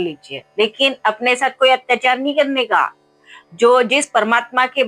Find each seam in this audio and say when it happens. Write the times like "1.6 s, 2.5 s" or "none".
none